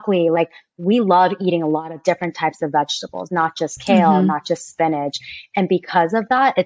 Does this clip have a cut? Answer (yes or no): no